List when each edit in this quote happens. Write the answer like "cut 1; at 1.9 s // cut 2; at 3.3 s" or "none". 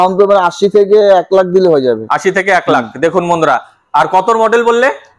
none